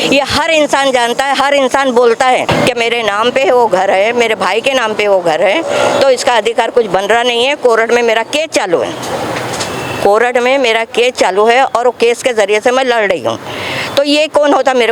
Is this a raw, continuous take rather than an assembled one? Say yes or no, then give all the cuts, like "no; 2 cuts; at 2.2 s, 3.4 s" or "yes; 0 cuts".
no; 1 cut; at 2.5 s